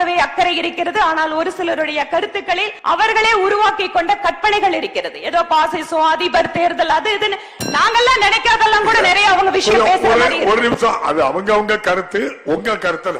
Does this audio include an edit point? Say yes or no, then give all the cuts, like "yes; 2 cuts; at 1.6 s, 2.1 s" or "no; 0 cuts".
yes; 1 cut; at 2.7 s